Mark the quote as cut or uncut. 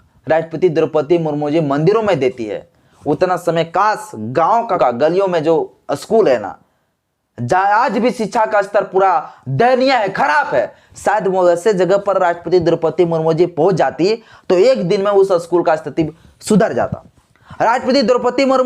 cut